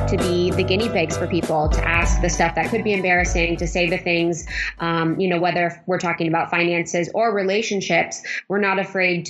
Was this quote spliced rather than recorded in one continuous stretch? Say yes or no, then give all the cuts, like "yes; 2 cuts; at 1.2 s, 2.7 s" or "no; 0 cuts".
no; 0 cuts